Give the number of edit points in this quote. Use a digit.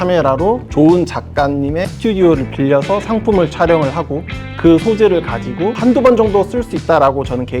1